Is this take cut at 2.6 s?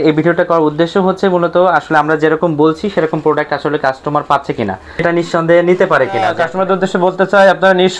no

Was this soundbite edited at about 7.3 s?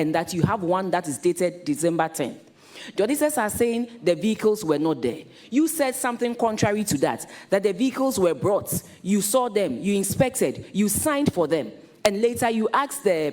no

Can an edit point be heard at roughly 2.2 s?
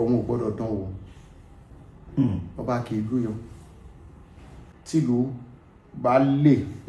no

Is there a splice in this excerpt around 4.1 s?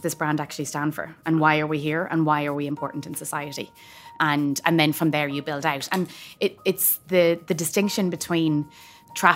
yes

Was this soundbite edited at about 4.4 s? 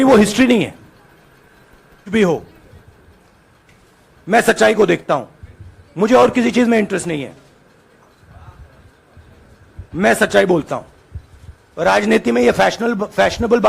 no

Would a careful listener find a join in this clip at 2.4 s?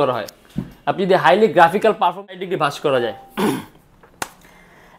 yes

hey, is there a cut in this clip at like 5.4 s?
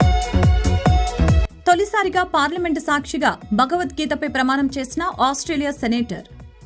no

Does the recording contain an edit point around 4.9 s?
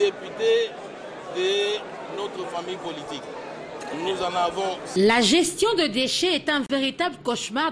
yes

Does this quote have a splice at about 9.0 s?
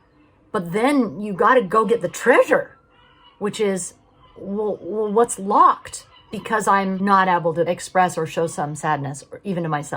no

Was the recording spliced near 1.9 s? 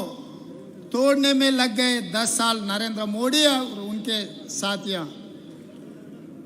yes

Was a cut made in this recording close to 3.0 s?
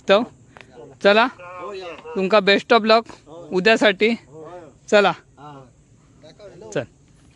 no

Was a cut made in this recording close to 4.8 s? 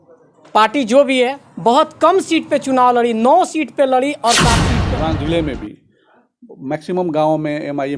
yes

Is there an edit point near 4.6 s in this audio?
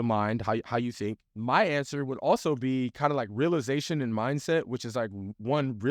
no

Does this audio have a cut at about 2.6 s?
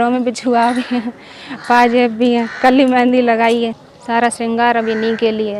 no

